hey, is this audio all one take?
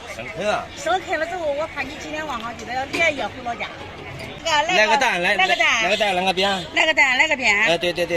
no; 1 cut; at 4.4 s

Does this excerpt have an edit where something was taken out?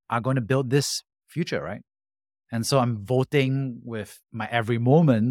no; 0 cuts

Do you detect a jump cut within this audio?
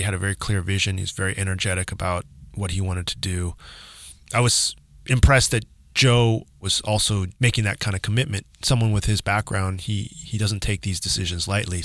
no; 0 cuts

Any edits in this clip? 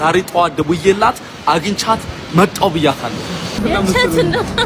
yes; 1 cut; at 3.6 s

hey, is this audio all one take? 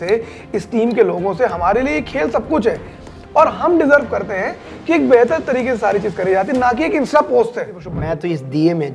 no; 1 cut; at 7.9 s

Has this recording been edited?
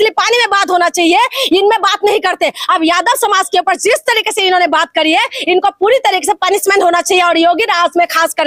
no; 0 cuts

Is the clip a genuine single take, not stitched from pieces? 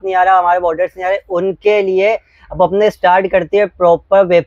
yes; 0 cuts

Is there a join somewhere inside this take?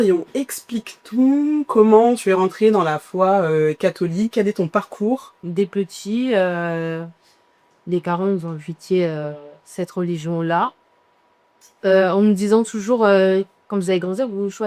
yes; 1 cut; at 5.3 s

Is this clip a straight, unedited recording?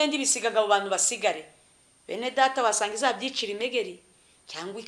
yes; 0 cuts

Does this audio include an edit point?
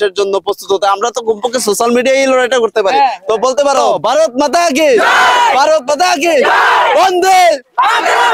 yes; 1 cut; at 3.9 s

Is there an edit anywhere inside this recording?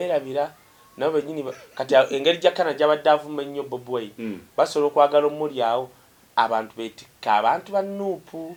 no; 0 cuts

